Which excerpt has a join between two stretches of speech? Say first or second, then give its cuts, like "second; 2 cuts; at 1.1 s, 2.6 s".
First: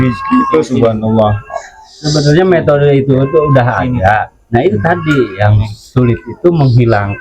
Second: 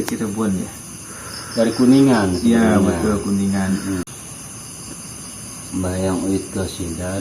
second; 1 cut; at 4.0 s